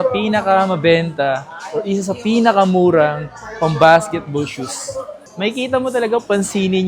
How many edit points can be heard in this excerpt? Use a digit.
1